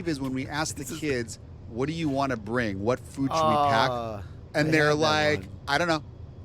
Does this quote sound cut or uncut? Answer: uncut